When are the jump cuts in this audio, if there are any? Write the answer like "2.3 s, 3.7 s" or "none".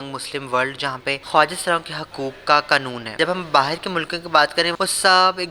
1.2 s, 3.2 s, 4.7 s